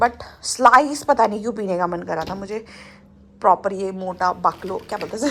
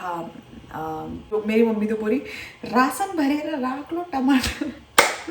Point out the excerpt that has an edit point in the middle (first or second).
second